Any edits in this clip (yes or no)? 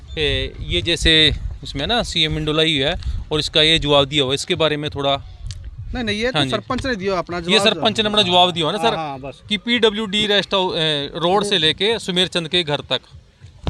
no